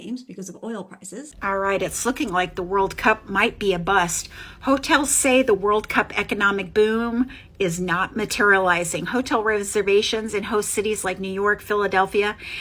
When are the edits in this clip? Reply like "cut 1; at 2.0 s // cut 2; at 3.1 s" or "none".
cut 1; at 1.4 s